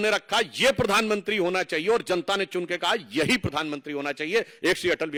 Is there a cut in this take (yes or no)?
no